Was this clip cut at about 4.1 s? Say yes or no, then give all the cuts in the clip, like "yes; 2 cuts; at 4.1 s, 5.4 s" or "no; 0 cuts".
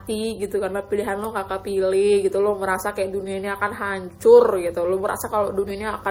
no; 0 cuts